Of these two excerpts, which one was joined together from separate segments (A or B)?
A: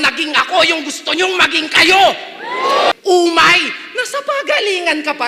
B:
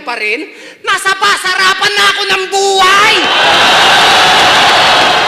A